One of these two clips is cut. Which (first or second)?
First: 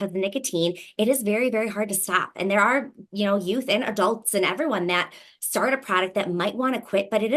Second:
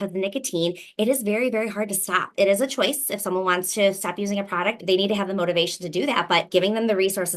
second